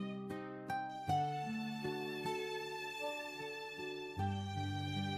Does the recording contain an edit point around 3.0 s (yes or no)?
no